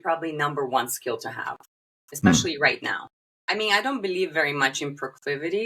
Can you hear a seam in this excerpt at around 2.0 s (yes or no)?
no